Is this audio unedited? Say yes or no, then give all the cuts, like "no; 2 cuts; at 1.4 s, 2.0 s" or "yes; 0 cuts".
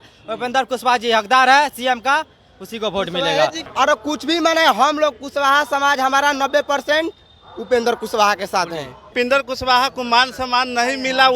no; 2 cuts; at 3.6 s, 9.0 s